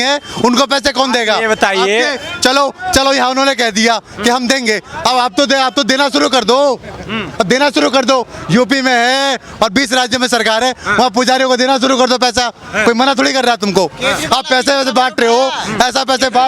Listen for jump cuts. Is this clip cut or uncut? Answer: uncut